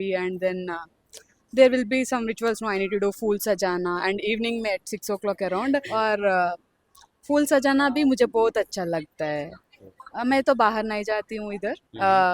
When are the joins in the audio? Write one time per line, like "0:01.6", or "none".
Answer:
0:05.9